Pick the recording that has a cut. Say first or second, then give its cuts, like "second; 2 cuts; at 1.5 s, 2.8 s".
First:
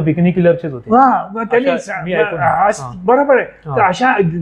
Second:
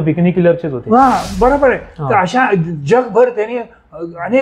second; 1 cut; at 1.3 s